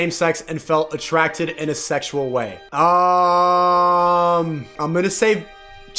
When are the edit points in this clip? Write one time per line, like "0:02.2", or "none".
0:02.6
0:04.7